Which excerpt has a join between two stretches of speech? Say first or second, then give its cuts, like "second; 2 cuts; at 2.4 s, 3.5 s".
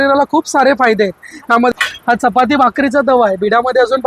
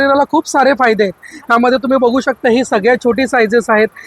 first; 1 cut; at 1.7 s